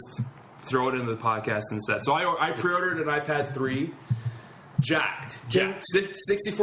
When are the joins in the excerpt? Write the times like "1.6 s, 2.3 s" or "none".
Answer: 1.4 s